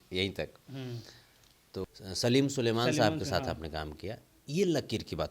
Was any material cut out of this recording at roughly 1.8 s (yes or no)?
yes